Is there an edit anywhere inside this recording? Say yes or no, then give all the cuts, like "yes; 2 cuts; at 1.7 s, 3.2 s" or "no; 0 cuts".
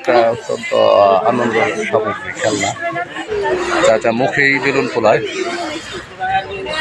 yes; 1 cut; at 3.2 s